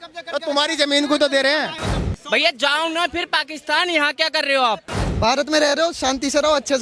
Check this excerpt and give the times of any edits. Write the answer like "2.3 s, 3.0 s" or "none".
1.8 s, 5.0 s